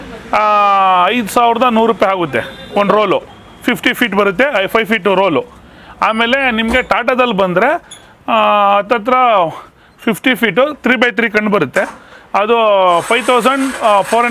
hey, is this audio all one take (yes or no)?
yes